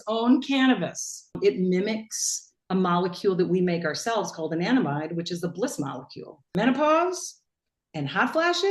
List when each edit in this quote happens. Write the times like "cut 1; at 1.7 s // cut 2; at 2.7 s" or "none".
cut 1; at 1.4 s // cut 2; at 6.4 s